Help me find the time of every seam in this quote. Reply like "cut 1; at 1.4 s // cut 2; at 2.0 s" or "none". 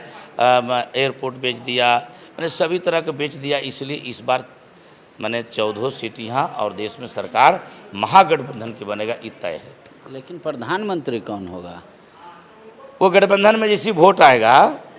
none